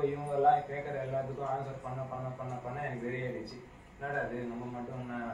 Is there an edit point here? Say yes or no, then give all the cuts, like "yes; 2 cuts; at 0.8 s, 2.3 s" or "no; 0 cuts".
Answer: no; 0 cuts